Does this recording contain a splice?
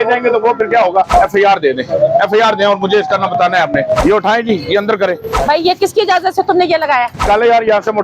yes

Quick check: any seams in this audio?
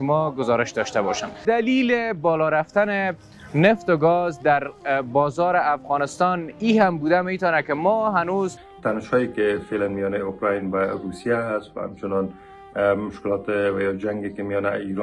yes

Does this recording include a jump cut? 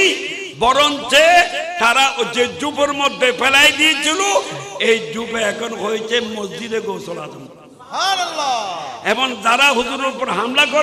no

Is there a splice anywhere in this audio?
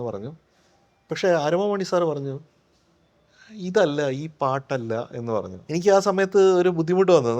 yes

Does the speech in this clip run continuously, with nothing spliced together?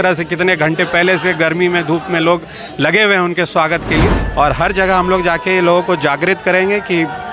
no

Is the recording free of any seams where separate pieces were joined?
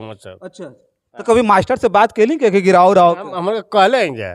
yes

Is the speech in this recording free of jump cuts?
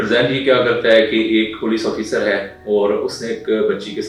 yes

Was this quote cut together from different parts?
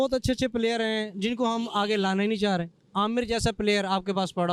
no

